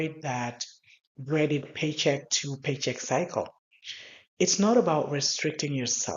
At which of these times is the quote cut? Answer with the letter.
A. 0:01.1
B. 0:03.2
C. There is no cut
C